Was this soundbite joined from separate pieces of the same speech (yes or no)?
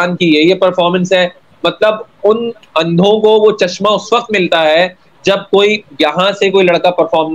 no